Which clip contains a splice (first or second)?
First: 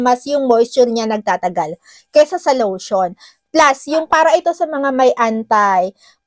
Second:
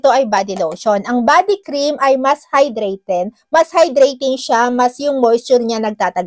first